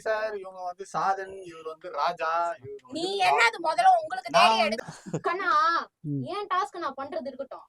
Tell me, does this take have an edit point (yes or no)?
yes